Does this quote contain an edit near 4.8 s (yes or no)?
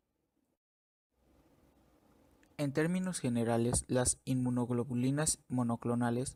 no